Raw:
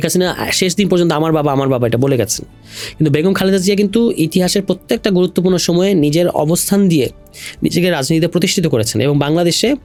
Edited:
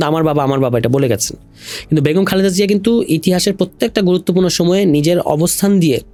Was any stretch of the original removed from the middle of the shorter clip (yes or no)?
no